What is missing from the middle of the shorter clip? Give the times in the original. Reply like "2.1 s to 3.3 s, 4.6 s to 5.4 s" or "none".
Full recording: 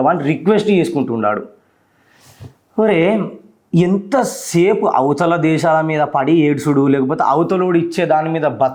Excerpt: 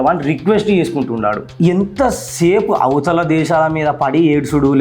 1.5 s to 3.6 s